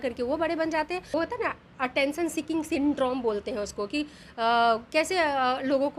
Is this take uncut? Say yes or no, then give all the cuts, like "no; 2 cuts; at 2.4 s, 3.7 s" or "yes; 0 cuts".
no; 1 cut; at 1.1 s